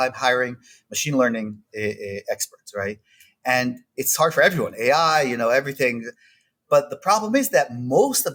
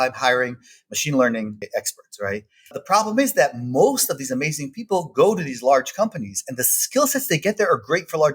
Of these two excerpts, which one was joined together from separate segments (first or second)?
second